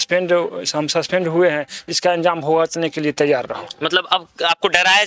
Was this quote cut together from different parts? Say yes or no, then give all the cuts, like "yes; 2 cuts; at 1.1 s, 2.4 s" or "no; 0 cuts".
no; 0 cuts